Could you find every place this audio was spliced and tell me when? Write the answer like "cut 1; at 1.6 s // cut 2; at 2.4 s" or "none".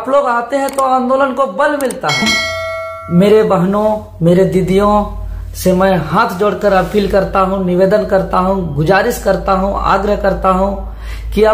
cut 1; at 2.4 s